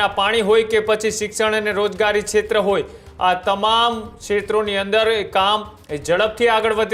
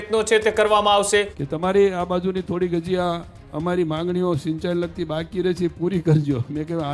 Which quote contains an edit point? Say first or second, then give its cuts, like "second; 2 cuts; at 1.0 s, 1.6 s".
second; 1 cut; at 1.4 s